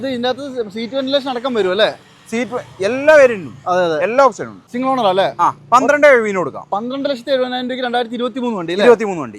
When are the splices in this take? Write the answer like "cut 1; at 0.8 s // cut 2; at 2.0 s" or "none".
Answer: cut 1; at 4.6 s